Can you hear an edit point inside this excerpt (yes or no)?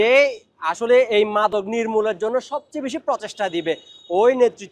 no